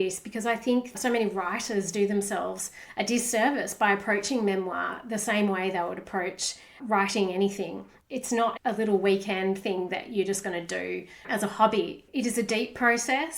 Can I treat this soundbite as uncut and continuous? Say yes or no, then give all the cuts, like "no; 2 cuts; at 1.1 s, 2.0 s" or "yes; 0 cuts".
no; 2 cuts; at 0.9 s, 8.1 s